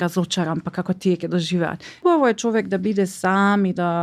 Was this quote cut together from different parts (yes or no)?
yes